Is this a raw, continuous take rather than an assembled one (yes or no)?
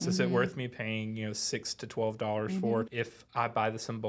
no